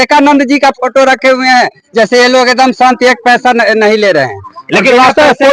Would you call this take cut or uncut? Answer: uncut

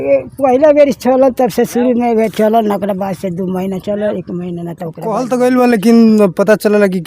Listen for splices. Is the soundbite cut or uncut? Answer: cut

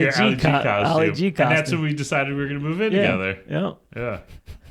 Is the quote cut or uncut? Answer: uncut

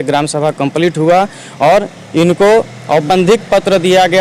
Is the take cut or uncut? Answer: uncut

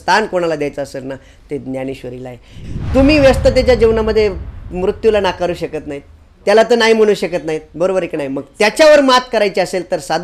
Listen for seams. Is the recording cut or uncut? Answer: cut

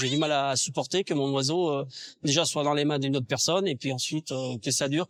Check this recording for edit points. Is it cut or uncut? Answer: uncut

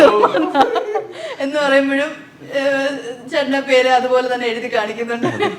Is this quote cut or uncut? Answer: uncut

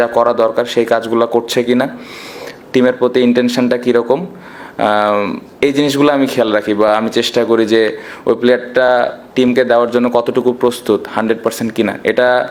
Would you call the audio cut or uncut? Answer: uncut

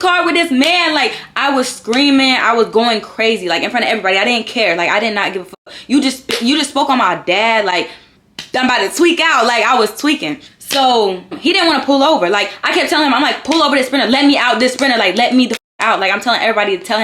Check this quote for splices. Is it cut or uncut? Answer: uncut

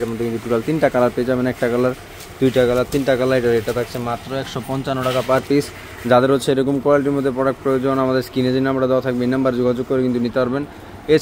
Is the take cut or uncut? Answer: uncut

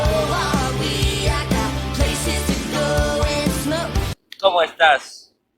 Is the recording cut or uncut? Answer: cut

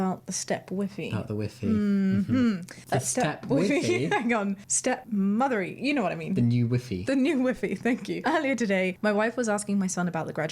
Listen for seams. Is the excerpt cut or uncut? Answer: uncut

